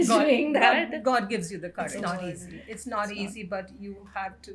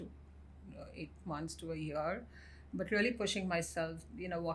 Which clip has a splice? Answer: first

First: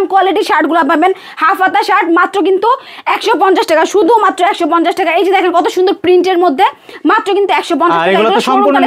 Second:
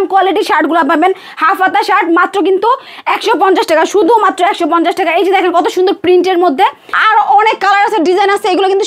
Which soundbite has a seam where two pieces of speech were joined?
second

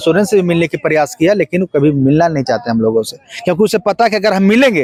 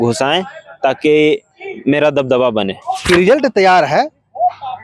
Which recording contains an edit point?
second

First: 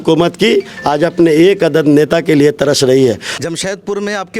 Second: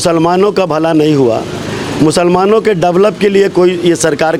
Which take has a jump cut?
first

